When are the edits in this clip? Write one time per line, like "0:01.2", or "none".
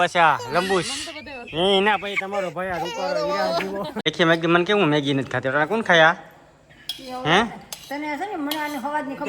0:04.0